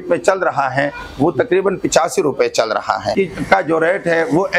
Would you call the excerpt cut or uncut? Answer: cut